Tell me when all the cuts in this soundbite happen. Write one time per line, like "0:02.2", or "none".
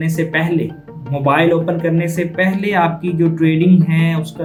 none

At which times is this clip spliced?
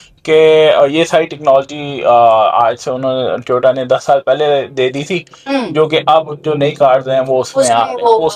none

